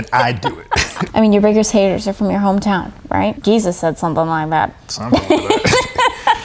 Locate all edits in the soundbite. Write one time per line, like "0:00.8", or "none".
0:01.1
0:03.4